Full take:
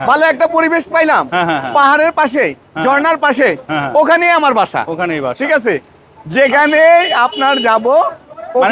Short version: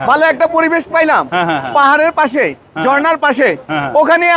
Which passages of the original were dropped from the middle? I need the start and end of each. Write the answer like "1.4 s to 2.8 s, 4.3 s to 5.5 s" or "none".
none